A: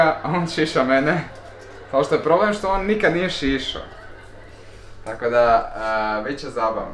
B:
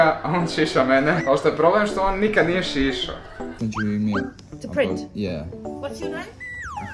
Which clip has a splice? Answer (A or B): B